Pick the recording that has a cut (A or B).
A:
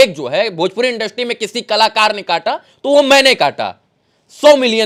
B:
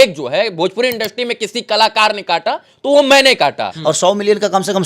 B